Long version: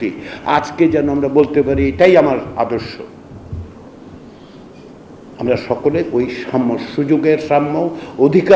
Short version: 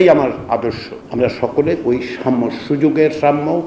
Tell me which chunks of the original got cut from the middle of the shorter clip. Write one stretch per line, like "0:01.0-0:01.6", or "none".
0:03.0-0:05.2